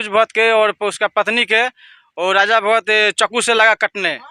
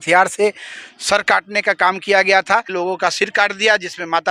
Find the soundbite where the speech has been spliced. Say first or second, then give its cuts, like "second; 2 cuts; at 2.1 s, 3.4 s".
second; 1 cut; at 2.7 s